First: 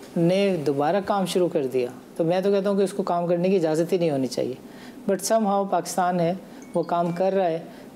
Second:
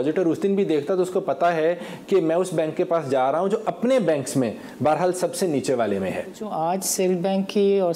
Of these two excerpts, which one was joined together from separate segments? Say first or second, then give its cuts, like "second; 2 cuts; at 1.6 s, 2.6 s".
second; 1 cut; at 6.4 s